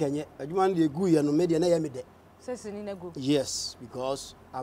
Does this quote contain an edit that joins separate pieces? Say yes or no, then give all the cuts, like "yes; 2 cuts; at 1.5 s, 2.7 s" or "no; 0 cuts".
no; 0 cuts